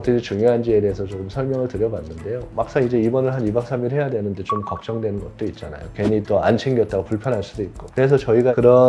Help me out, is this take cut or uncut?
cut